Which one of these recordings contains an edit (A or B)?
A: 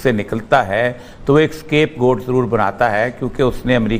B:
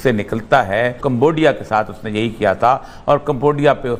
B